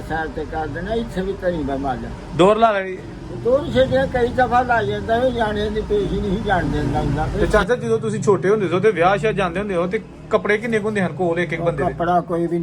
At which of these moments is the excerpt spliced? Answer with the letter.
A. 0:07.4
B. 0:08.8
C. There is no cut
A